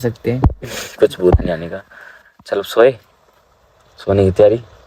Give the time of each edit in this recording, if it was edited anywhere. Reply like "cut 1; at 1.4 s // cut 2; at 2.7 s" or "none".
none

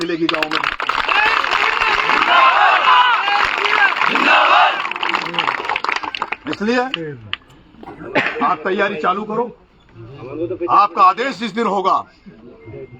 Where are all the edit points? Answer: none

